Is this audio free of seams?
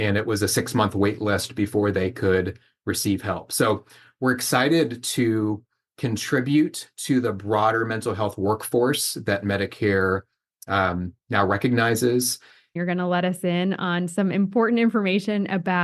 no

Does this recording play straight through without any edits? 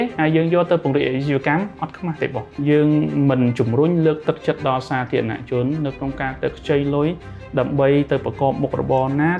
no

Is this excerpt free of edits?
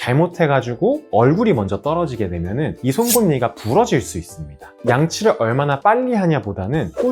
no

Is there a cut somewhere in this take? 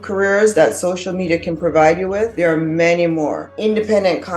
yes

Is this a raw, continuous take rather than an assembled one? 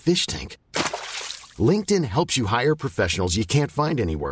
yes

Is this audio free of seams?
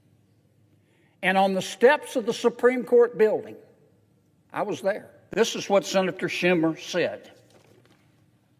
no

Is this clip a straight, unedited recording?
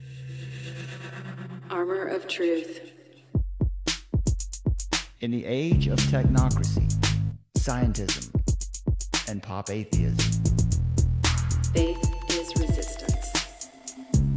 no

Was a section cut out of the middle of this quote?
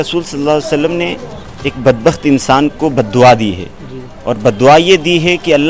no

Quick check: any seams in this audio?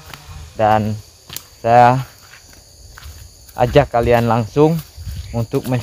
no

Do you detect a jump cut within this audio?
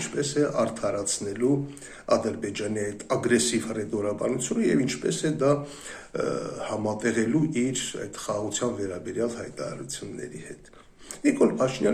no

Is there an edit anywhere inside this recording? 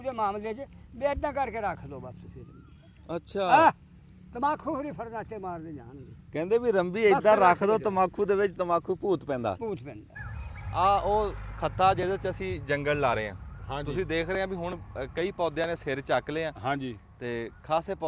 yes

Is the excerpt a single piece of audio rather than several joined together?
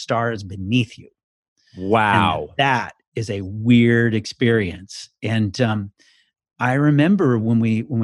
yes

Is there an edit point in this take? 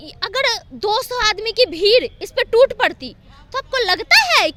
no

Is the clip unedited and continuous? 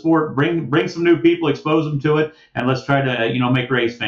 yes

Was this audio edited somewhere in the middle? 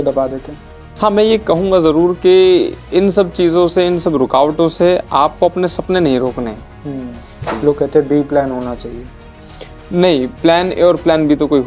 yes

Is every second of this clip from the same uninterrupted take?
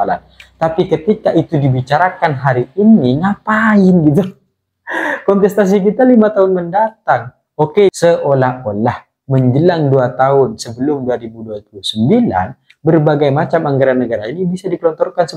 no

